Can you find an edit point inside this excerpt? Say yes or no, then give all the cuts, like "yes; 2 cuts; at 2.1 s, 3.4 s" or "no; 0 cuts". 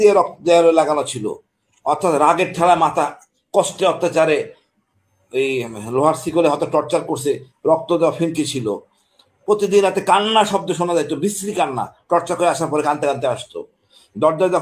no; 0 cuts